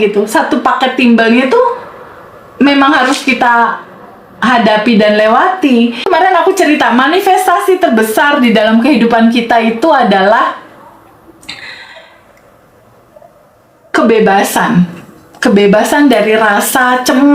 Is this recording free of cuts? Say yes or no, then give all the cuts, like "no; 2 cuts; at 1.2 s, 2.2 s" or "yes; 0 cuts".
no; 1 cut; at 6.1 s